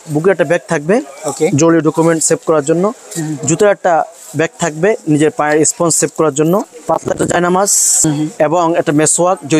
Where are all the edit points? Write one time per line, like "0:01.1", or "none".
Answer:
0:06.7
0:08.0